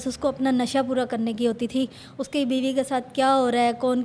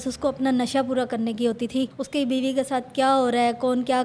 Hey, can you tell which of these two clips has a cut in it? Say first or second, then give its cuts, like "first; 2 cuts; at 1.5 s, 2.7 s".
second; 1 cut; at 2.0 s